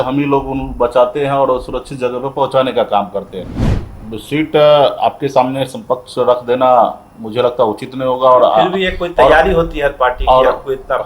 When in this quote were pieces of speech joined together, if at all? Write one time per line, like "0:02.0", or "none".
0:03.8